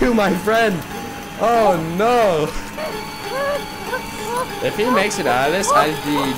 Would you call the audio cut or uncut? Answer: cut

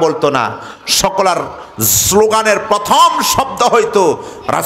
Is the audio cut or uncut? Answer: uncut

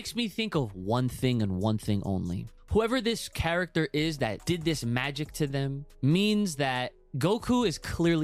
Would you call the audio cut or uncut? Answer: cut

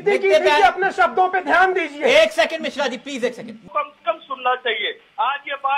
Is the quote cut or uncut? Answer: cut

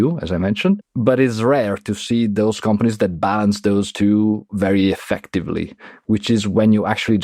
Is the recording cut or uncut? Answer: uncut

